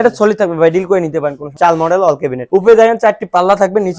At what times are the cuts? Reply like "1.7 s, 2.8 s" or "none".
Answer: 1.5 s, 2.4 s